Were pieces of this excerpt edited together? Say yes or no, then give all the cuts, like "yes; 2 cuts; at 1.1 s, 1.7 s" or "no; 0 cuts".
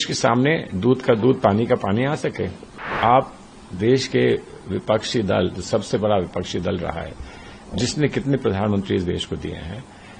yes; 1 cut; at 2.9 s